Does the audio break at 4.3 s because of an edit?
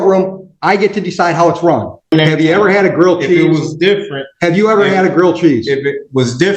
no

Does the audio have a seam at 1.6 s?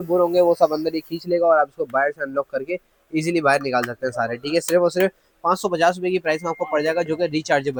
no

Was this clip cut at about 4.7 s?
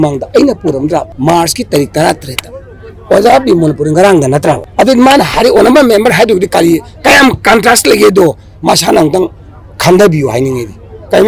yes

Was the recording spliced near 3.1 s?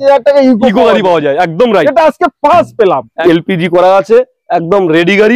yes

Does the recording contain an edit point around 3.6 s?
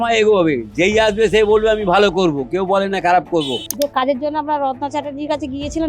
yes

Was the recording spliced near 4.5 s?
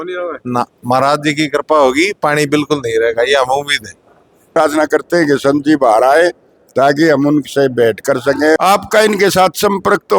yes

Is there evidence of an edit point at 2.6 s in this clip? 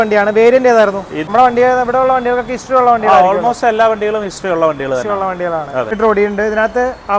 no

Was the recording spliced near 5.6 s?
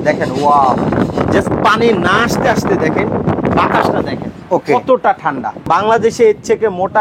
yes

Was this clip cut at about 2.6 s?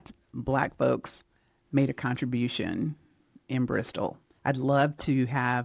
no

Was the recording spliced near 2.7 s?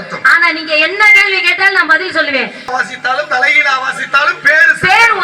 yes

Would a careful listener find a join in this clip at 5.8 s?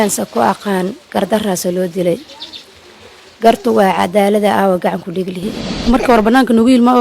yes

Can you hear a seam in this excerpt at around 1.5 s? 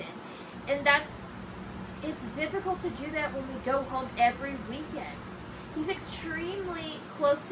no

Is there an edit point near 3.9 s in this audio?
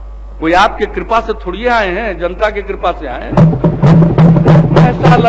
no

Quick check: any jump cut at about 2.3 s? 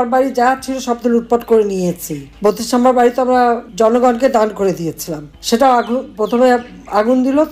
no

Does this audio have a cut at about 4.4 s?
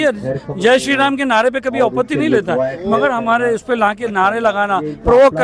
no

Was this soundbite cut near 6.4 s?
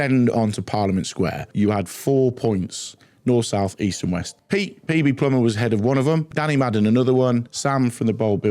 yes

